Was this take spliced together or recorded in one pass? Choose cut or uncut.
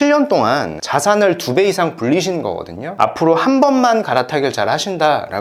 cut